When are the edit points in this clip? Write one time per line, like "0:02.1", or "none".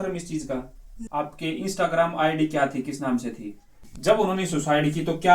0:00.9
0:03.9